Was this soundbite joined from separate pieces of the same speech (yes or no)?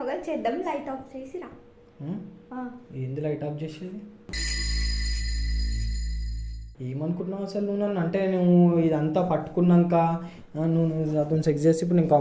no